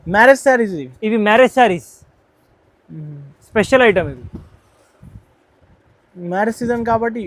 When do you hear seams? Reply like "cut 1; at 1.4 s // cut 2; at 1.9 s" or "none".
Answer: none